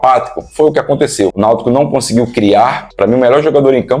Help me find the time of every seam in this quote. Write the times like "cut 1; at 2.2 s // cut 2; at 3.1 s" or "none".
cut 1; at 1.8 s // cut 2; at 2.9 s